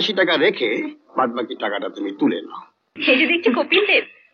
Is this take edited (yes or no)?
yes